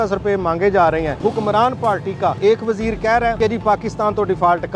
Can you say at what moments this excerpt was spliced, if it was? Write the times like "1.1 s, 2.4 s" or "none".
1.2 s, 2.4 s, 3.4 s